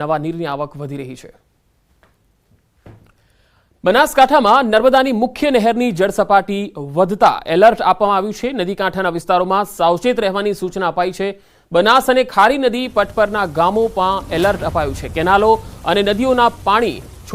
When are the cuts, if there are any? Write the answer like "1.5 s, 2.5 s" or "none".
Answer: 10.4 s